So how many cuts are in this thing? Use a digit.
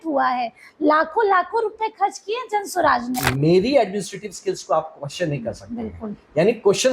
1